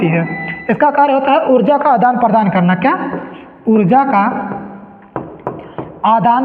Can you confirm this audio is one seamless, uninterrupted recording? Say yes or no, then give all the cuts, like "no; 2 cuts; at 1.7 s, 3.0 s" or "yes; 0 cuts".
yes; 0 cuts